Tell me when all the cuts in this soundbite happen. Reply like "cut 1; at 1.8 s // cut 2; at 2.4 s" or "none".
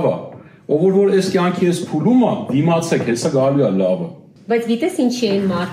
cut 1; at 4.3 s